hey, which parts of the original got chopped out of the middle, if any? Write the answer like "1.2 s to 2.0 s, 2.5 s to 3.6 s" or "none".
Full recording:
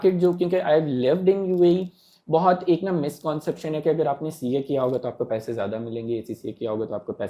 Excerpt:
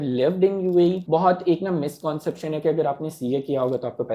1.9 s to 2.2 s

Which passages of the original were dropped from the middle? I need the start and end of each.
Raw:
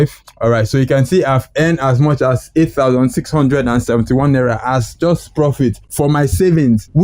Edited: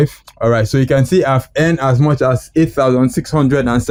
none

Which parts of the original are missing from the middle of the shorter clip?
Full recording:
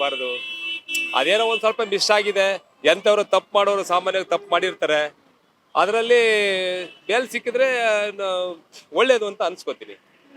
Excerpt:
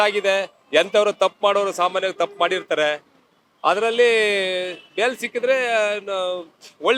none

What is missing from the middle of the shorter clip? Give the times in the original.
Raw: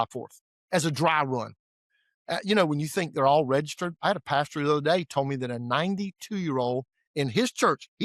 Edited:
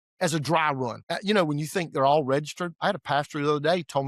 1.5 s to 2.2 s

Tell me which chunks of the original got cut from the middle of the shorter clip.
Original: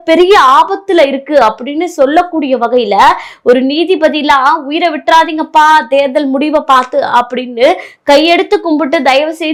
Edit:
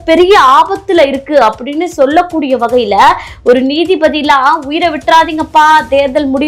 none

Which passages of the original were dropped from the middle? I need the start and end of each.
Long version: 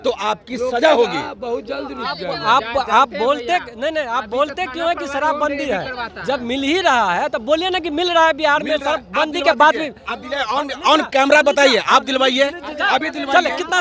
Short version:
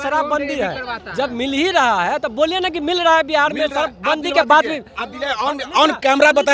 none

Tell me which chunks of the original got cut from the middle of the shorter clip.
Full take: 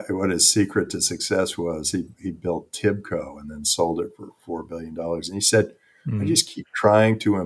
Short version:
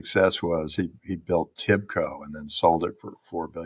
none

